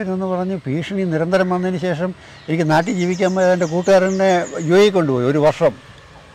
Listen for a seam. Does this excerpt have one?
no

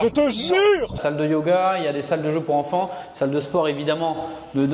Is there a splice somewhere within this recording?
yes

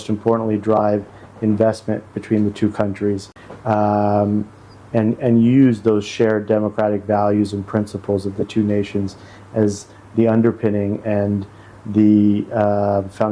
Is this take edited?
no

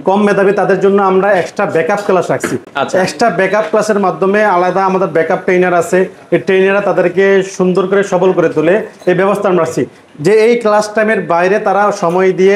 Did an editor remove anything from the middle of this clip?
no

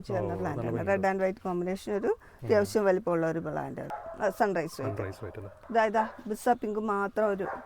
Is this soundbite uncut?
no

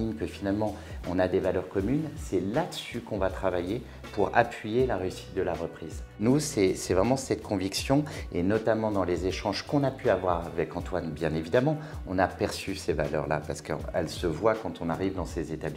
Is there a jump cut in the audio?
no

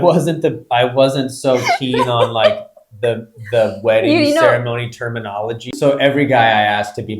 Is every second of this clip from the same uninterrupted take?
no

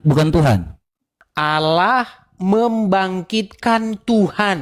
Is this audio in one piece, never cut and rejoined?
no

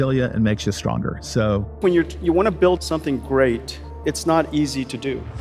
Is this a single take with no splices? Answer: no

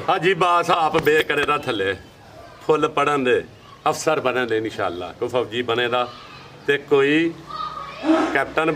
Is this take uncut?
yes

